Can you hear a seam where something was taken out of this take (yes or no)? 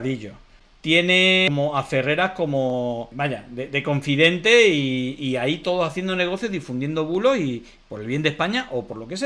yes